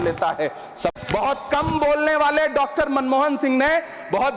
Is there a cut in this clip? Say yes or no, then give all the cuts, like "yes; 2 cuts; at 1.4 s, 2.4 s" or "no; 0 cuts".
yes; 1 cut; at 0.9 s